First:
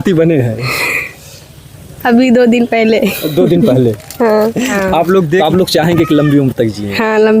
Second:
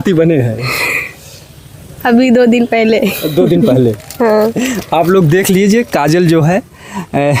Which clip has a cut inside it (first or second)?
first